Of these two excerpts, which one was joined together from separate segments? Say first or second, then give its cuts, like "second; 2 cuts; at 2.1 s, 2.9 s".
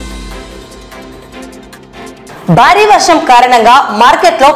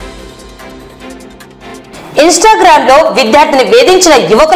second; 1 cut; at 1.8 s